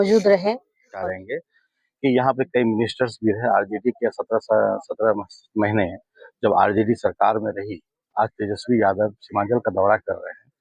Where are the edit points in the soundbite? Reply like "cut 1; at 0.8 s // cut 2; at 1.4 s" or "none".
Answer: cut 1; at 1.0 s